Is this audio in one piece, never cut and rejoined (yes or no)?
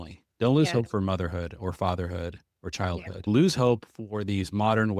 no